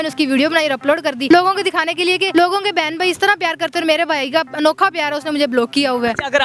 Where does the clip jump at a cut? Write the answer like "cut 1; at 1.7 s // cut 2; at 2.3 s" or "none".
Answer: cut 1; at 1.2 s // cut 2; at 2.3 s